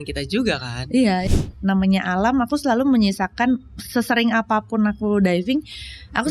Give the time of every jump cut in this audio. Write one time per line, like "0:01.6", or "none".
0:01.2